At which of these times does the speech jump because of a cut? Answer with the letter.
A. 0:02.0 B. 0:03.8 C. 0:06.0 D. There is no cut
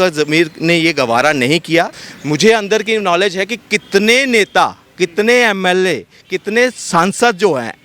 A